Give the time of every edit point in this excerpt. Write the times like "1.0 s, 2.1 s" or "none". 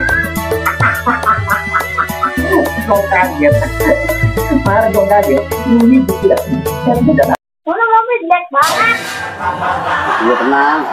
7.4 s

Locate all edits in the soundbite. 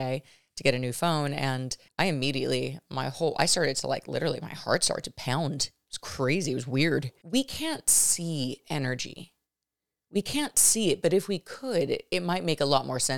1.8 s, 7.2 s

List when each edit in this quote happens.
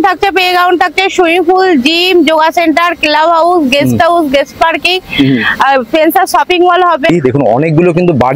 7.1 s

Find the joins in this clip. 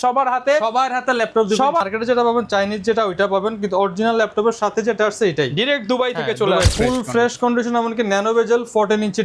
1.8 s, 6.7 s

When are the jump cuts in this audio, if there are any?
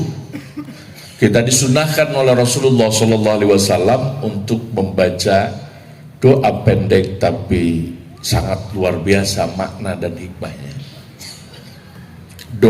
none

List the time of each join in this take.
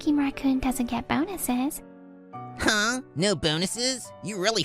2.4 s

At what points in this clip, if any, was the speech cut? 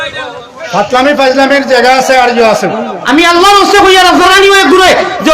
4.3 s

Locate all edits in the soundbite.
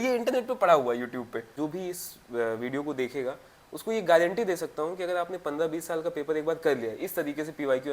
1.5 s

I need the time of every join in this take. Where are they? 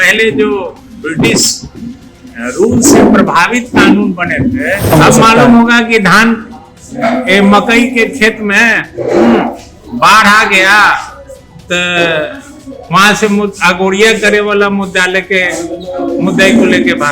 4.9 s

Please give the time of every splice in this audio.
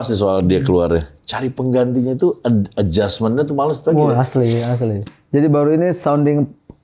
5.0 s

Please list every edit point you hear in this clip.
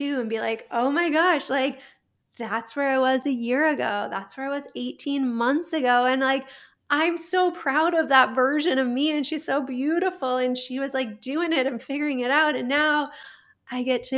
none

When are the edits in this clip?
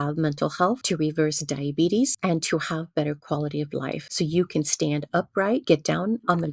0.8 s, 2.2 s, 4.1 s, 5.6 s

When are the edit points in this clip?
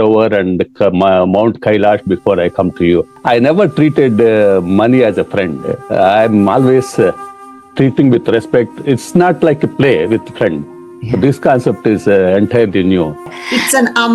3.1 s, 13.2 s

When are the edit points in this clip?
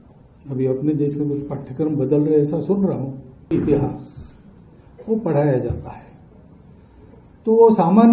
3.5 s

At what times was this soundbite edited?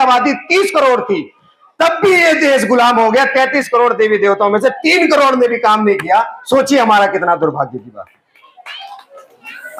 none

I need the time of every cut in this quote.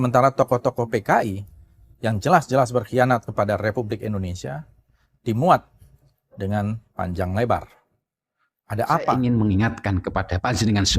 9.1 s

